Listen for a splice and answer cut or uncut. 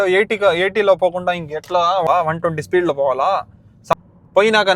cut